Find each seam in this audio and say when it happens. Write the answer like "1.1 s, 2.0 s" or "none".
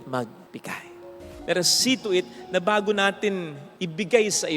1.2 s